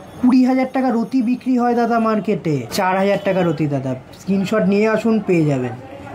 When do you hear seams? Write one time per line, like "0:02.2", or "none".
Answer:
0:02.7